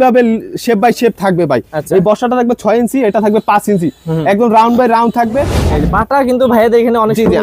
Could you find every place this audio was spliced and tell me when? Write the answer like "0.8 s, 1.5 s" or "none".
5.6 s